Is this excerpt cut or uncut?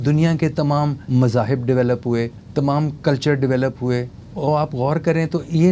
cut